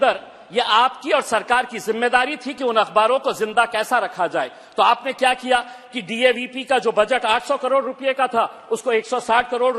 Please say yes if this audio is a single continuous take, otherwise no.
yes